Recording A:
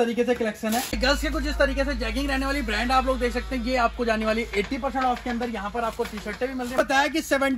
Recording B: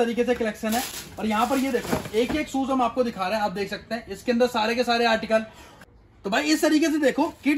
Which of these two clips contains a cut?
A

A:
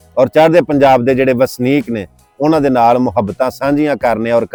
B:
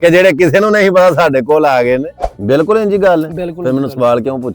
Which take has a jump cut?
B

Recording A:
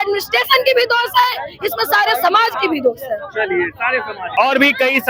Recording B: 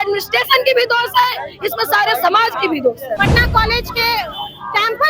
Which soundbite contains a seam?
B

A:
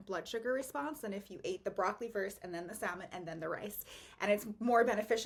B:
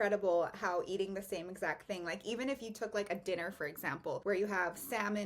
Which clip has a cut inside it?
B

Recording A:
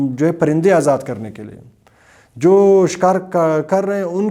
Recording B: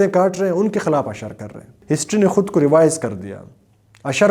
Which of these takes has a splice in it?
B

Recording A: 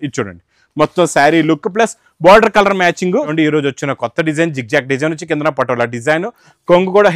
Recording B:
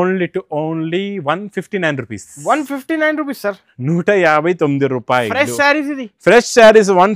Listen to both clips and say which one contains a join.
A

